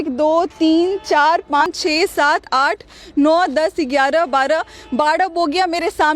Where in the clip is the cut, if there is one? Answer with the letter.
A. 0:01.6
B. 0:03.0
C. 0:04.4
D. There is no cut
A